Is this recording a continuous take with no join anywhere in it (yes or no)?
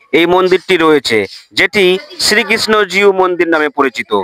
yes